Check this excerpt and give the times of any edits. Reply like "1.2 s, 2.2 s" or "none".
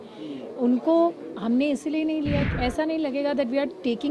2.5 s